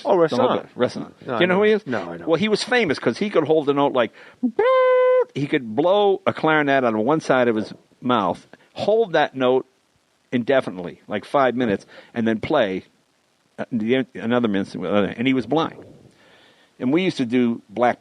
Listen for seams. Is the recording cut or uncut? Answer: cut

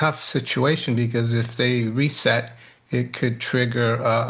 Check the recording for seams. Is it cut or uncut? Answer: uncut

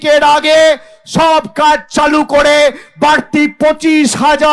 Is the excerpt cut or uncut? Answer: uncut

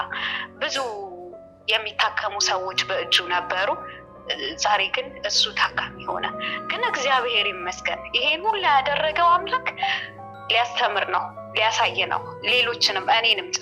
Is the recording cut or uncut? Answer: uncut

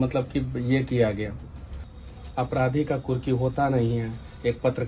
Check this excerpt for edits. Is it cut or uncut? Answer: cut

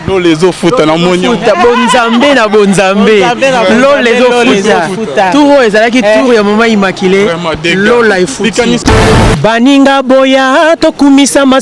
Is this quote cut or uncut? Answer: cut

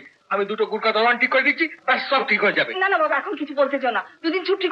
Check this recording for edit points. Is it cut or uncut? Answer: uncut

